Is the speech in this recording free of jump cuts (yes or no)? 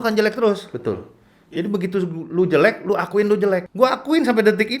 no